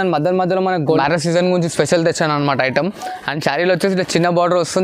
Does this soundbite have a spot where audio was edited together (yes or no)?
yes